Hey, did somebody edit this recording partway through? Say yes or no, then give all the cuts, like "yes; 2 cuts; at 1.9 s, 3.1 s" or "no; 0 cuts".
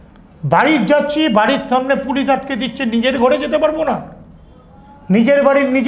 no; 0 cuts